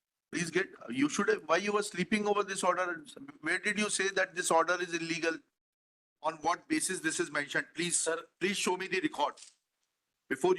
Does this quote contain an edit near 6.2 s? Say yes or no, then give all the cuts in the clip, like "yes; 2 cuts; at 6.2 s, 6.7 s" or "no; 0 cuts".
yes; 1 cut; at 6.2 s